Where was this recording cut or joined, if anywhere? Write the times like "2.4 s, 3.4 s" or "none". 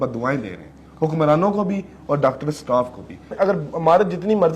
3.3 s